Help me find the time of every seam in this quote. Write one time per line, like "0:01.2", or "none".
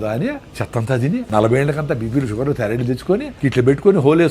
0:01.1
0:03.3